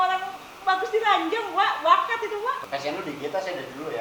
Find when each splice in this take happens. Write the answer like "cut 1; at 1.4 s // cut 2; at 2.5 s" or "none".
cut 1; at 2.6 s